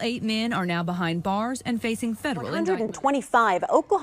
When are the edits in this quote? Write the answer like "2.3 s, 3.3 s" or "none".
3.0 s

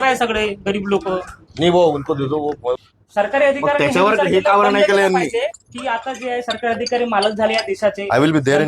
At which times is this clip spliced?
2.8 s

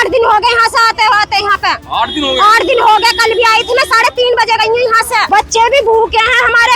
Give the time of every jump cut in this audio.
5.2 s

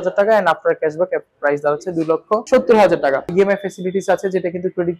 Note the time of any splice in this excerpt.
2.4 s, 3.3 s

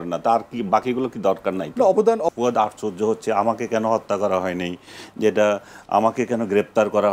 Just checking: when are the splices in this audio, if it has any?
2.3 s

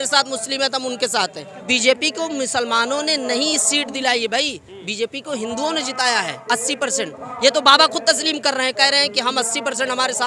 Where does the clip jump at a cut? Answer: 1.6 s

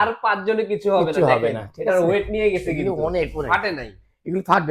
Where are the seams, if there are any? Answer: none

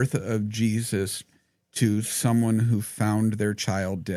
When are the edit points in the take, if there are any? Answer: none

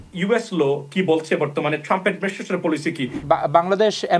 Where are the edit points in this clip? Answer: 3.2 s

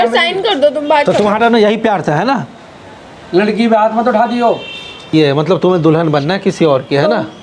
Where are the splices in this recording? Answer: 5.1 s

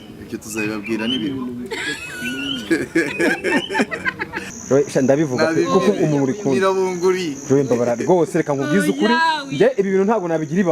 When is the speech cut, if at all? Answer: 4.5 s

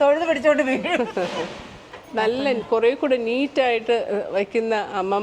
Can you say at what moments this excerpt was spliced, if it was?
1.9 s

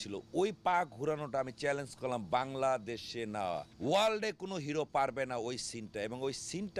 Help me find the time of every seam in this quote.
3.7 s

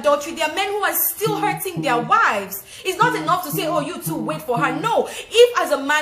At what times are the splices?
none

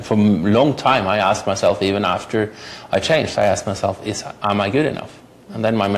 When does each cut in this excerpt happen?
none

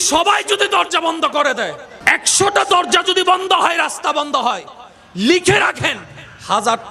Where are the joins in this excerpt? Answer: 1.9 s

